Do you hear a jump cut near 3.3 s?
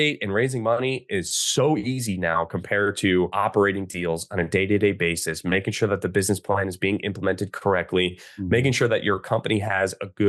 yes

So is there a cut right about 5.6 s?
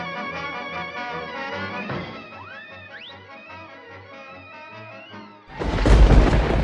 yes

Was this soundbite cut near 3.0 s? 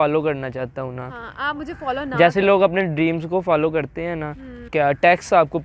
no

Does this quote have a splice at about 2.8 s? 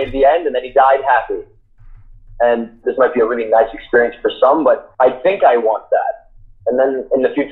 yes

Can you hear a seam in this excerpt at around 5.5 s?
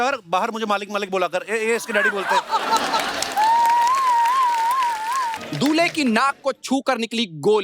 yes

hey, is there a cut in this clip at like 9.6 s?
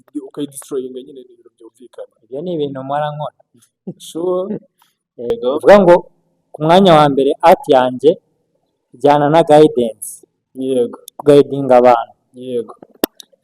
no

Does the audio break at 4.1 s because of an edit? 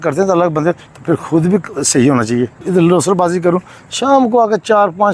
no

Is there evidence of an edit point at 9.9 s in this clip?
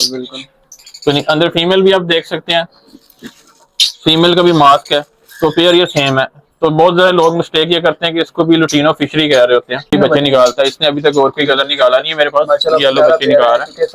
yes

